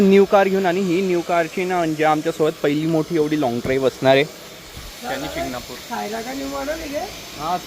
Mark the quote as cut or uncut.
uncut